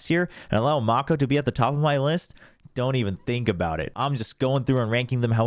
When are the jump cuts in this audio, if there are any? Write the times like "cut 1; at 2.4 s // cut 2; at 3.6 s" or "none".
cut 1; at 3.9 s